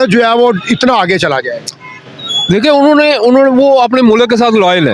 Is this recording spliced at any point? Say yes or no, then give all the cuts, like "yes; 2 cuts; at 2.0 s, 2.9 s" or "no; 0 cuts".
no; 0 cuts